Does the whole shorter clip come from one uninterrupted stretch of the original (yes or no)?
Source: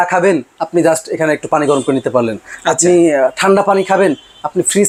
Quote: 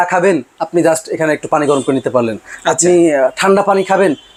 yes